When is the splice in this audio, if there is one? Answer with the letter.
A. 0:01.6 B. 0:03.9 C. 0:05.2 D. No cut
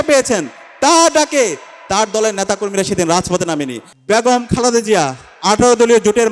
B